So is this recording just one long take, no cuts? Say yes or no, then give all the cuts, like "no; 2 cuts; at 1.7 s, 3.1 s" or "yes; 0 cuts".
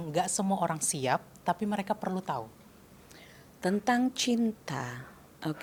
yes; 0 cuts